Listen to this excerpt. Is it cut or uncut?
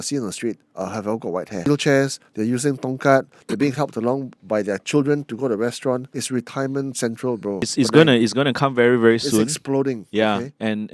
cut